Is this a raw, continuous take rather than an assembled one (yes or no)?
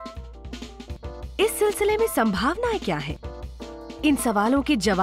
no